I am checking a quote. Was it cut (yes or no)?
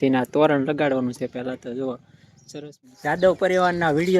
yes